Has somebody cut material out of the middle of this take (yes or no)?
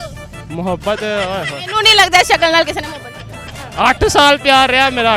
no